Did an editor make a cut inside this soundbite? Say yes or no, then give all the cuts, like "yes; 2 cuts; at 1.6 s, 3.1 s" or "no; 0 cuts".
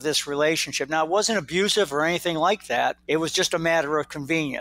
yes; 1 cut; at 3.0 s